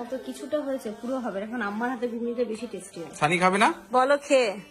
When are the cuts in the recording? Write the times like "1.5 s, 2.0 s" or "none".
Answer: 3.8 s